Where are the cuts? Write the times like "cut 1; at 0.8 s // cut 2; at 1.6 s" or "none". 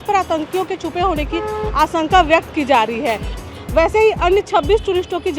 cut 1; at 3.4 s